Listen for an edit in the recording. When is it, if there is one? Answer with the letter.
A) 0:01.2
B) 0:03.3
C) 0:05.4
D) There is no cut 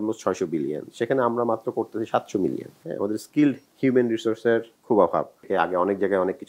C